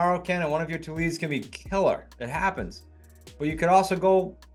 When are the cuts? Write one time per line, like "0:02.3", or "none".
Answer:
none

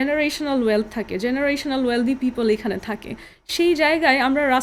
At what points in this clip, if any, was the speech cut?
none

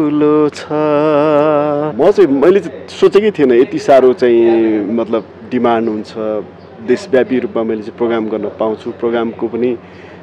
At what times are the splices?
0:01.9

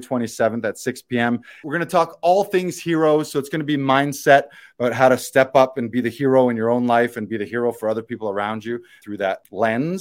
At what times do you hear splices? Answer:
0:01.6
0:09.0

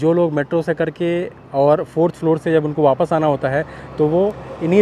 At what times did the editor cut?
none

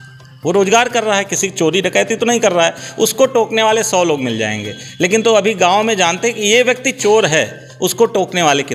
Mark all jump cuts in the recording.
none

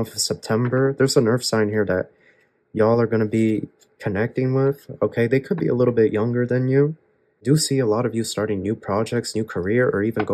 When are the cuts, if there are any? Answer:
0:07.4

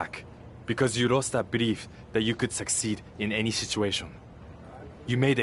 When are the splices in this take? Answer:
none

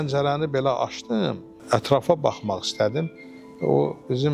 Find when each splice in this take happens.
none

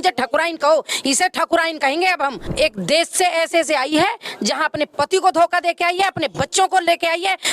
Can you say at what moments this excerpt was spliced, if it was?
0:02.5

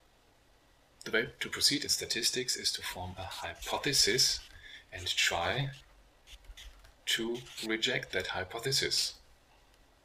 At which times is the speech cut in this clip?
none

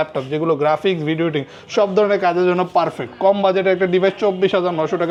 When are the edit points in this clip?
none

